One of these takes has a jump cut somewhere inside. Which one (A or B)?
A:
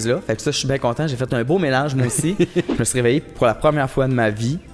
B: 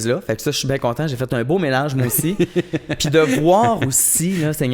A